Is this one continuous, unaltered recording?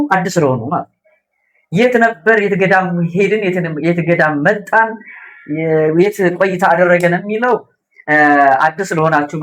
yes; 0 cuts

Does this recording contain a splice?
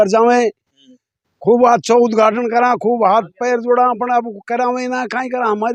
no; 0 cuts

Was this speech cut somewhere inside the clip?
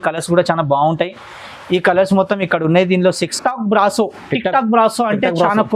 yes; 1 cut; at 3.3 s

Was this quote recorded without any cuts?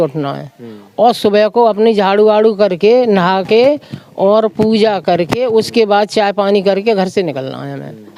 yes; 0 cuts

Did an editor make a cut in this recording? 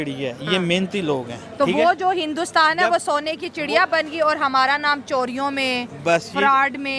no; 0 cuts

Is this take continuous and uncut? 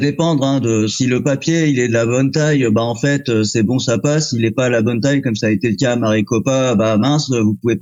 yes; 0 cuts

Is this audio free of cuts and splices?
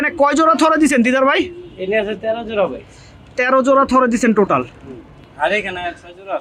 yes; 0 cuts

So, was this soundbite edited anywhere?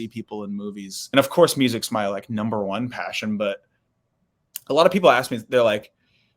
yes; 1 cut; at 1.1 s

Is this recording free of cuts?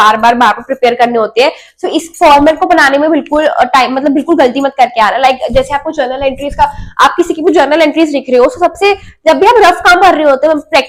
yes; 0 cuts

